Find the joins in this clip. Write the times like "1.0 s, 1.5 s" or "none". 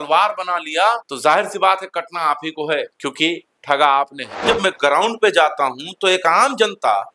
1.1 s, 4.4 s